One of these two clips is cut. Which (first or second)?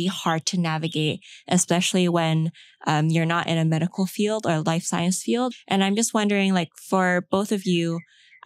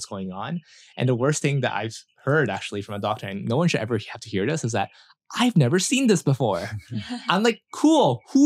first